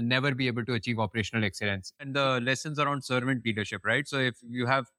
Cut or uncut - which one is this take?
cut